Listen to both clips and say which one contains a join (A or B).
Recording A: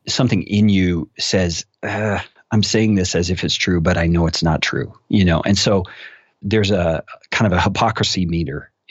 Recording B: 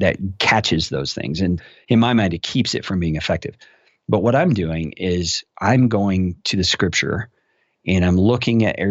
B